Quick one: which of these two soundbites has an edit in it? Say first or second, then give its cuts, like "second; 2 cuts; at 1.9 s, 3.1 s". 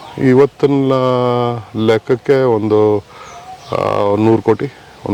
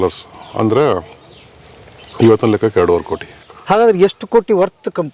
second; 1 cut; at 3.5 s